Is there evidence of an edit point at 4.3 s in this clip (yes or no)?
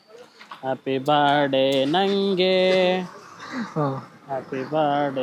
no